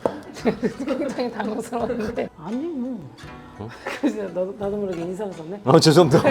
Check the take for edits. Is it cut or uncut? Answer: cut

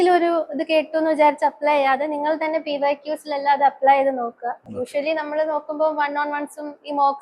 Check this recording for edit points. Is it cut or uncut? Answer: cut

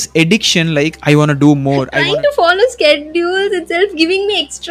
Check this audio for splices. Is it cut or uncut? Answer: cut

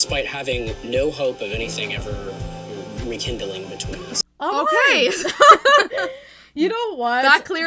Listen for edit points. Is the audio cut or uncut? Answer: cut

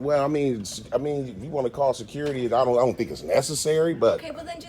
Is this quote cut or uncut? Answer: uncut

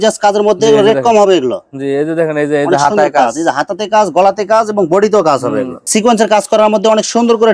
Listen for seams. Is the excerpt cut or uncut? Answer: cut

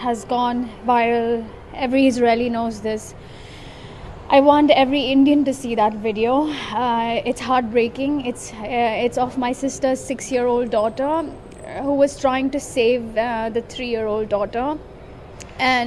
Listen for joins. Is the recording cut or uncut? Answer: uncut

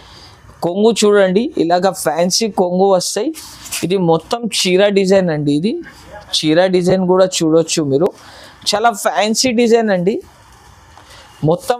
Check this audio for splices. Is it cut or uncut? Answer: uncut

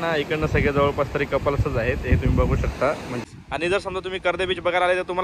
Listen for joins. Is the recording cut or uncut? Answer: cut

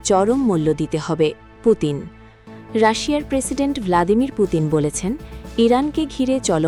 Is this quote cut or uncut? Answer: uncut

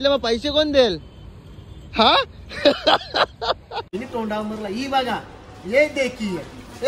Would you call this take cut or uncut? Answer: cut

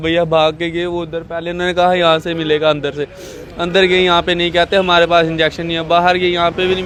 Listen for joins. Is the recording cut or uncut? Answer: uncut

